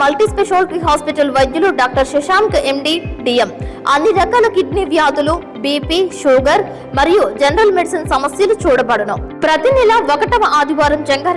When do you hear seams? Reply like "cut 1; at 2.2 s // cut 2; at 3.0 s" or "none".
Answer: none